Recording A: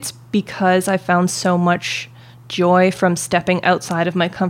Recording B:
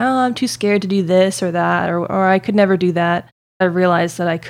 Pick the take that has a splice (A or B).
B